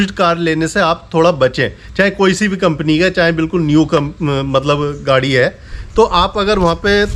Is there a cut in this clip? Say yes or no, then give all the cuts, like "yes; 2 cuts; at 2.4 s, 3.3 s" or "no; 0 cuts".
no; 0 cuts